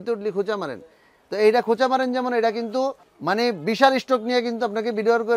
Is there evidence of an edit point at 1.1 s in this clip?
no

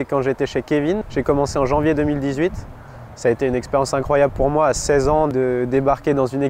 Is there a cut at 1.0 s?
yes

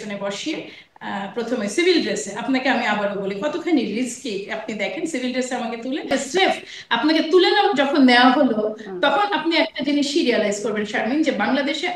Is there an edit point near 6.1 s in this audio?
yes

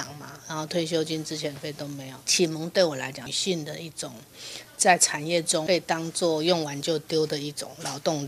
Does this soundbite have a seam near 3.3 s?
yes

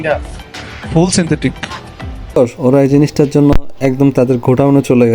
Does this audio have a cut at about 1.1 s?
no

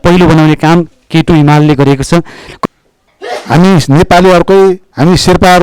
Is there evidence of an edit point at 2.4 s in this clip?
yes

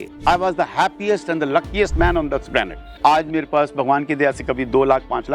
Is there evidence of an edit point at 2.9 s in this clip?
yes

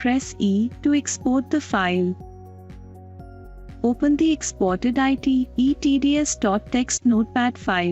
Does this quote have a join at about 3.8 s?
yes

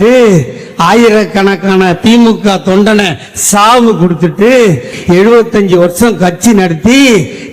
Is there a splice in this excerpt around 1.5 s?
no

